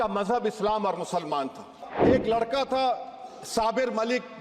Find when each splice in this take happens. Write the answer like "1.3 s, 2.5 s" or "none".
1.9 s